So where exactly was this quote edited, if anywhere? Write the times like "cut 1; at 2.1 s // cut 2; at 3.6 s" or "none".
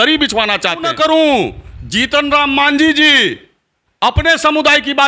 cut 1; at 0.9 s